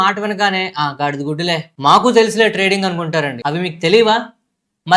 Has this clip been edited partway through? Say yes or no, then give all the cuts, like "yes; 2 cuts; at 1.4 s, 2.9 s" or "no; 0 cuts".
yes; 1 cut; at 3.4 s